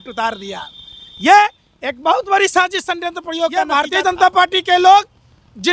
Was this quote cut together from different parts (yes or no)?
yes